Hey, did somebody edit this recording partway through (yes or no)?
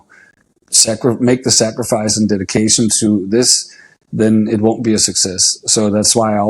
no